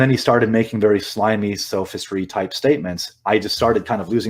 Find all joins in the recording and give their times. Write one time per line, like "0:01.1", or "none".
none